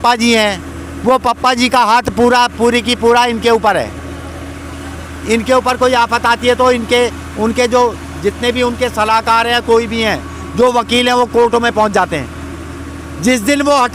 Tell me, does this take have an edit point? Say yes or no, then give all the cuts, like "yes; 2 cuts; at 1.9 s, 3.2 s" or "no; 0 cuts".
no; 0 cuts